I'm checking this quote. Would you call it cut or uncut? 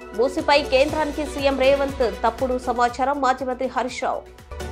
uncut